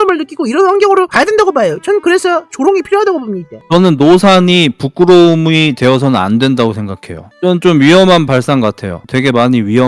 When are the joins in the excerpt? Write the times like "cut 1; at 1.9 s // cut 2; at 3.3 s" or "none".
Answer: cut 1; at 9.0 s